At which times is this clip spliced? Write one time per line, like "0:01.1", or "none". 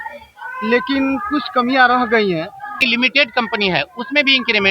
0:02.8